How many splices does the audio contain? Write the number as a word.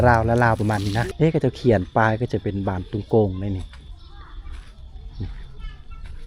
one